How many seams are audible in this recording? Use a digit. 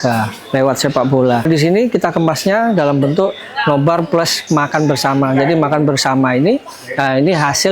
1